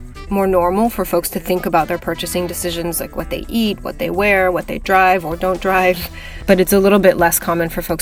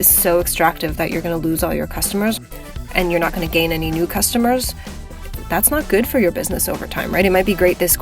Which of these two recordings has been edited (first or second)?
second